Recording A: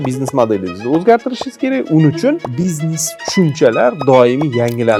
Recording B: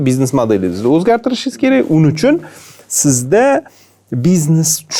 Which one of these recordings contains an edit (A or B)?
A